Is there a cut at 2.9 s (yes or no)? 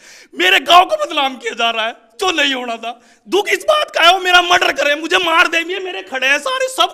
no